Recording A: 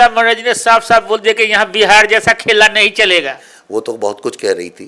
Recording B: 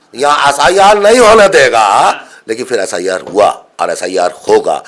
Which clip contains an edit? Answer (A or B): A